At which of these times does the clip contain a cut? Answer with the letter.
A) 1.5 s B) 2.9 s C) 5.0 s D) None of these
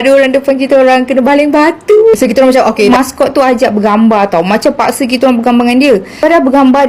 B